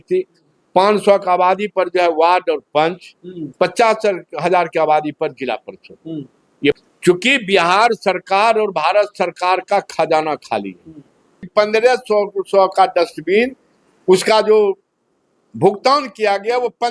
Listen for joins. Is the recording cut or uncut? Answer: cut